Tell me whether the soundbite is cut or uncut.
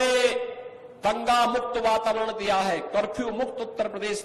uncut